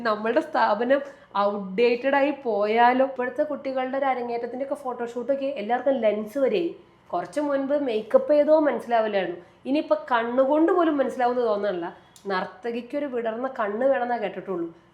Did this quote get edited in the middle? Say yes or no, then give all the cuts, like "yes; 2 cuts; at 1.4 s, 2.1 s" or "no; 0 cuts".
yes; 1 cut; at 3.1 s